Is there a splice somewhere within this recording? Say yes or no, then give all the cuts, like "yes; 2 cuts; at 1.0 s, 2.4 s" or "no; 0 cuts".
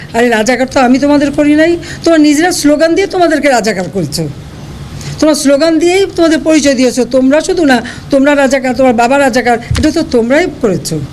no; 0 cuts